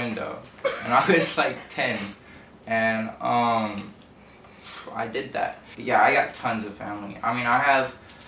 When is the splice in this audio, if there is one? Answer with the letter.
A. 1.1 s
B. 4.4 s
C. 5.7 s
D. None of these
C